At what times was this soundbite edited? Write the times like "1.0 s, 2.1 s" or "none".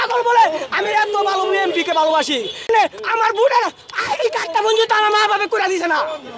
2.7 s